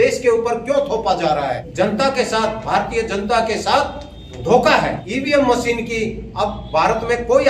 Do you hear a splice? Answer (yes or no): yes